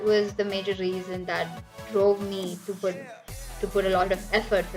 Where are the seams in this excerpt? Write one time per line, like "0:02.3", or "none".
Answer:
none